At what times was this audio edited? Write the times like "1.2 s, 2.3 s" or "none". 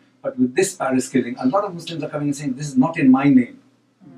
0.9 s